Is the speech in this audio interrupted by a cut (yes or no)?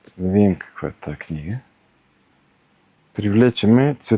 no